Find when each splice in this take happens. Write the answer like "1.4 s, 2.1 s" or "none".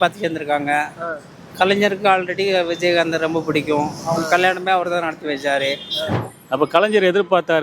6.2 s